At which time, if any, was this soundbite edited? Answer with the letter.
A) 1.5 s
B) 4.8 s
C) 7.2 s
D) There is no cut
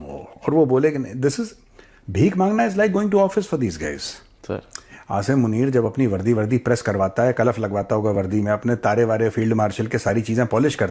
D